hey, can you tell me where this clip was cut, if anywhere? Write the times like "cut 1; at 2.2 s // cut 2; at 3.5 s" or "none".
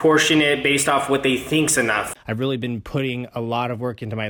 cut 1; at 2.1 s

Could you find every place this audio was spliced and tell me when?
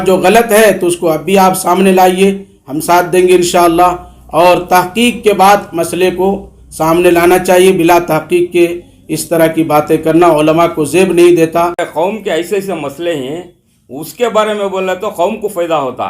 cut 1; at 11.8 s

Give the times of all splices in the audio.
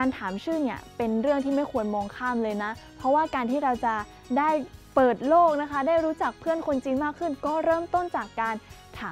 none

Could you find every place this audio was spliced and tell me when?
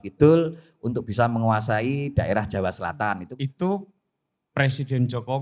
cut 1; at 3.2 s

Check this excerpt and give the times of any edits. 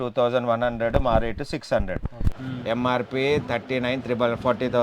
cut 1; at 2.2 s

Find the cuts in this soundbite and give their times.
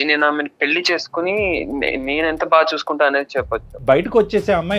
cut 1; at 3.7 s

